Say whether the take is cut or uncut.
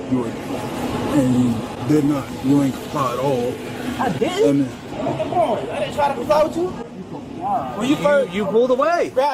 uncut